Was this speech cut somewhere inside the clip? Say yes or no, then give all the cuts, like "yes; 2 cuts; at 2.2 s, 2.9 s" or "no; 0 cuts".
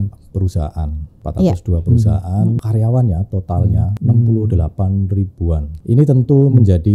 yes; 4 cuts; at 1.2 s, 2.6 s, 3.9 s, 5.7 s